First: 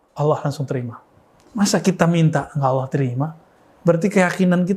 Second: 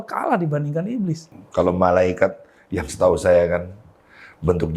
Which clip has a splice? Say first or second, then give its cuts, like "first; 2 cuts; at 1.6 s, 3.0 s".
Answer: second; 1 cut; at 1.3 s